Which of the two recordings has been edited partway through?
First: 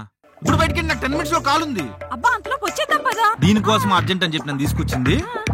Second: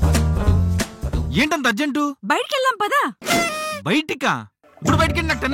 first; 1 cut; at 3.4 s

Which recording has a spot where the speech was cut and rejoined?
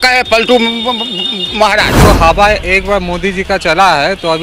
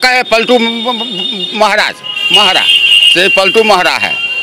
first; 1 cut; at 2.0 s

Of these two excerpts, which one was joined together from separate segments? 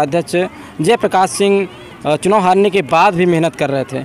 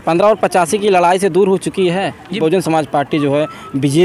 second; 1 cut; at 2.4 s

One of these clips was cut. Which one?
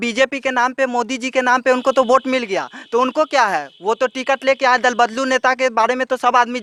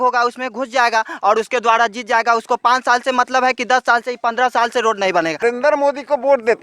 second; 1 cut; at 5.4 s

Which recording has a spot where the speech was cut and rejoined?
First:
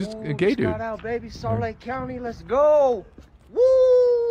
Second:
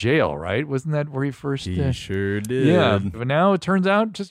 second; 1 cut; at 3.2 s

